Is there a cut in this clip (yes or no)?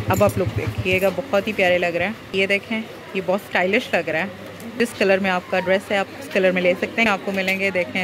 yes